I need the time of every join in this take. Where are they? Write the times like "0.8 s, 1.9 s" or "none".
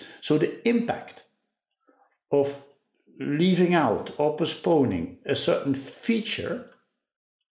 none